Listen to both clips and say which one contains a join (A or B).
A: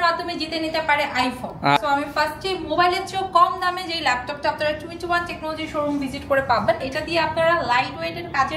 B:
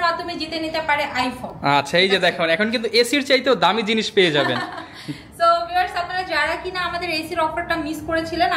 A